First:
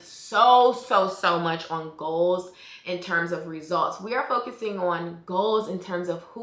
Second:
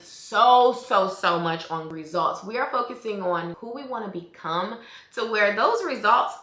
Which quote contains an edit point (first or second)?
second